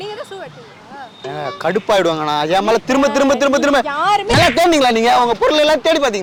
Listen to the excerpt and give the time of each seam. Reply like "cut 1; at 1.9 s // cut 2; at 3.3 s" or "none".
none